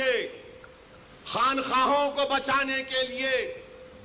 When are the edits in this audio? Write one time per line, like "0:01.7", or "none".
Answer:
none